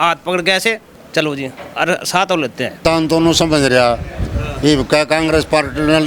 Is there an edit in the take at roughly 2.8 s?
yes; 1 cut; at 2.8 s

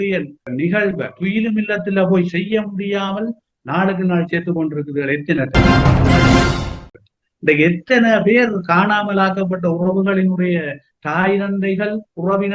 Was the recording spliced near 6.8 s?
yes; 3 cuts; at 1.1 s, 5.5 s, 6.8 s

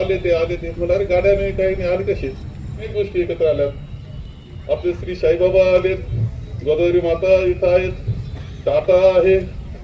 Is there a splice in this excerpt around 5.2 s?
no; 1 cut; at 2.9 s

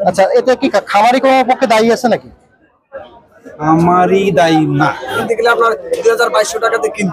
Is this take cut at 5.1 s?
yes; 1 cut; at 5.1 s

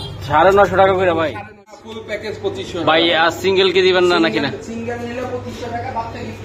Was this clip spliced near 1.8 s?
yes; 1 cut; at 1.8 s

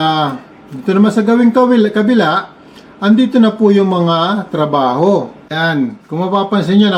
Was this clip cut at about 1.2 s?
no; 1 cut; at 5.4 s

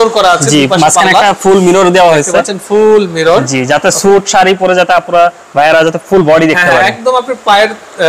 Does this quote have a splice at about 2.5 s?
no; 0 cuts

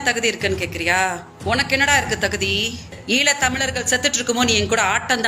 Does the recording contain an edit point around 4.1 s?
no; 2 cuts; at 1.6 s, 2.9 s

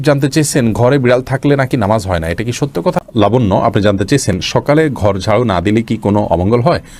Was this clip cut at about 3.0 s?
yes; 1 cut; at 3.0 s

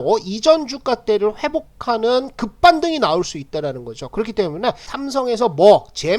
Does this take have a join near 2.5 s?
no; 1 cut; at 4.9 s

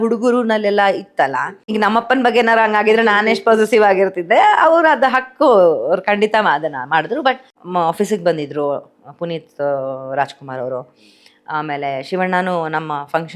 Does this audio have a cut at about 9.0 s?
no; 2 cuts; at 1.6 s, 7.5 s

